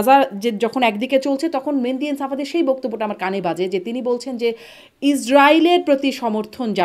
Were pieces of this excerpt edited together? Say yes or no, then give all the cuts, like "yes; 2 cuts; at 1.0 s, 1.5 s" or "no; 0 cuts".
no; 0 cuts